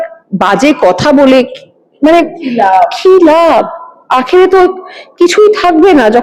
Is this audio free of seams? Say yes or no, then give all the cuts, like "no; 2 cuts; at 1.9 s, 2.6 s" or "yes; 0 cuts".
yes; 0 cuts